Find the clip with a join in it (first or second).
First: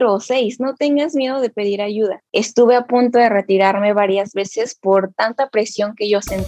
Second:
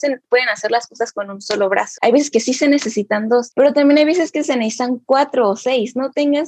first